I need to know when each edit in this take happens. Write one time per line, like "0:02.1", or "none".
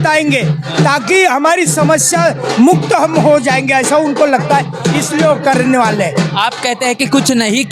none